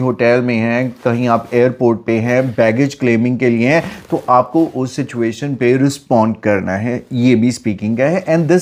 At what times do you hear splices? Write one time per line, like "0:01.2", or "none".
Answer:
none